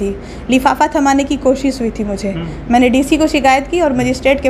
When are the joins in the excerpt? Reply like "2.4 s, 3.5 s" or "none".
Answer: none